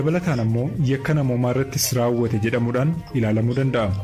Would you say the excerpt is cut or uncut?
uncut